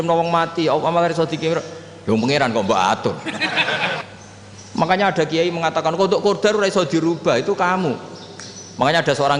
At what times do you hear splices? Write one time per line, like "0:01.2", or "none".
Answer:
0:04.0